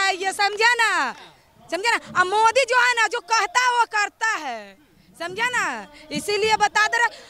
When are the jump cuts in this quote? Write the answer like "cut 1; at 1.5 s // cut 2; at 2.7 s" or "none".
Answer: none